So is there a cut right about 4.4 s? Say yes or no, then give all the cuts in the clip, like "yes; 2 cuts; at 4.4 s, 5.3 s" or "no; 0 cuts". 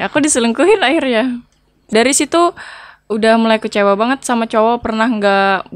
no; 1 cut; at 1.9 s